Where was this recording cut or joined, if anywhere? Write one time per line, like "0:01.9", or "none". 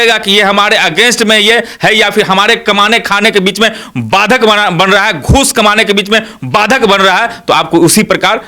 none